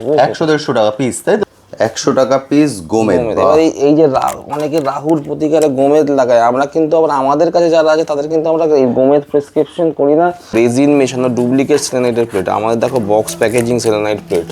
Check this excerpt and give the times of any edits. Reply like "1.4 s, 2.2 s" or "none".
1.4 s, 10.5 s